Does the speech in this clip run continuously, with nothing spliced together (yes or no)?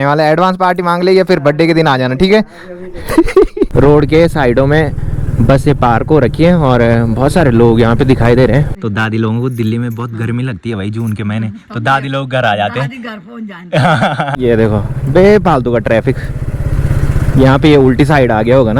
no